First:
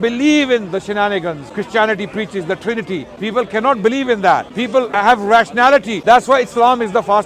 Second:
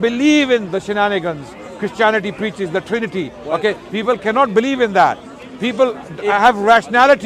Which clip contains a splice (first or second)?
first